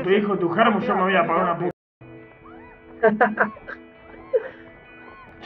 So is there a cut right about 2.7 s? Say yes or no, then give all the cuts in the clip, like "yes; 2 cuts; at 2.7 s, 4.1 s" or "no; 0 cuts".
no; 0 cuts